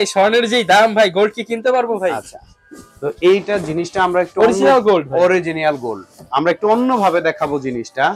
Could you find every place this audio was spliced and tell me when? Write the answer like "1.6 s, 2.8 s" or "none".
none

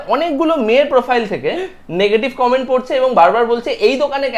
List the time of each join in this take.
none

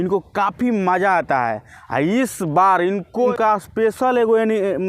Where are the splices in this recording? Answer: 3.3 s

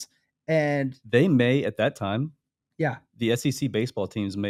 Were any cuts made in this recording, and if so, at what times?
none

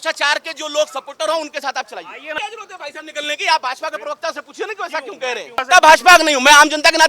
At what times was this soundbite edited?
2.3 s, 5.6 s

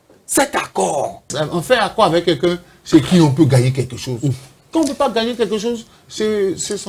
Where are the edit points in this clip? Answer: 1.3 s

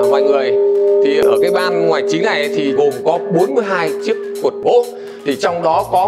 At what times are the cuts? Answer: 1.2 s, 2.7 s, 4.6 s

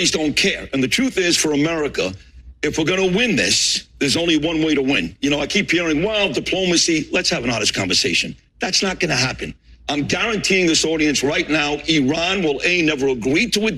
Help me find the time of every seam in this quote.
none

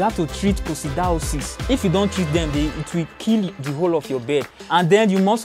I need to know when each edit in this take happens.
1.7 s, 3.6 s, 4.6 s

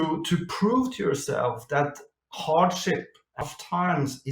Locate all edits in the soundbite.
3.4 s

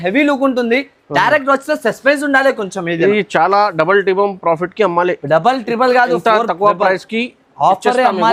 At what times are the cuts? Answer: none

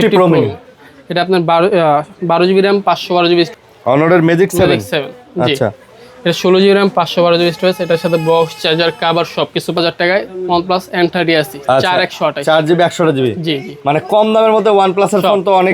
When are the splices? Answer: 3.7 s, 9.8 s

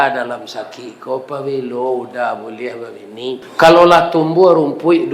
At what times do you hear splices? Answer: 3.5 s

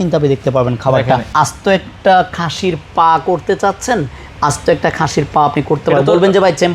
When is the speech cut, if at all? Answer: 1.3 s

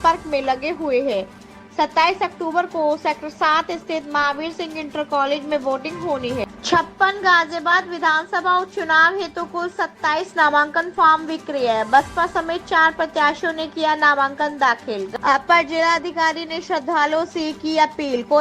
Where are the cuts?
6.4 s, 15.1 s

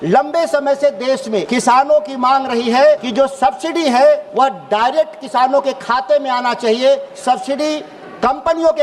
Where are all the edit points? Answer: 1.5 s, 3.1 s, 4.3 s, 7.1 s

